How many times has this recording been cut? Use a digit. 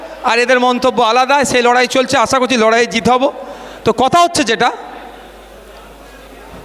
0